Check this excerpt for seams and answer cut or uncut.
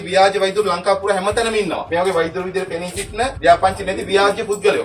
uncut